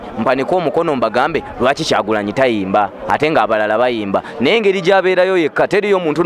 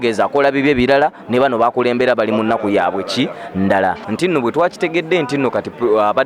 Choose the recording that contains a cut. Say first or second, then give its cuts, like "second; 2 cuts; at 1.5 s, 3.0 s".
second; 1 cut; at 4.0 s